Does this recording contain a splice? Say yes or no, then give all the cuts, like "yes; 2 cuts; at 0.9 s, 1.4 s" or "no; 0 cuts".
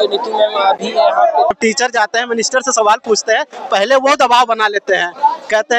yes; 1 cut; at 1.5 s